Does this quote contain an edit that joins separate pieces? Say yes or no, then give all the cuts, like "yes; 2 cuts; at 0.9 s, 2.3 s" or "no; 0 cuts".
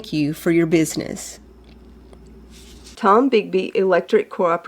yes; 1 cut; at 2.8 s